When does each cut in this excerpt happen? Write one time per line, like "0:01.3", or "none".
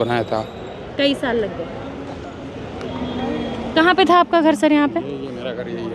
none